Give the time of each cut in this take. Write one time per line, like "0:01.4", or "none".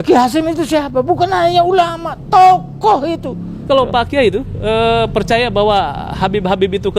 0:03.6